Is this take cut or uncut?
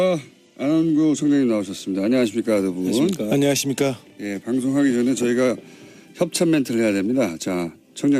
uncut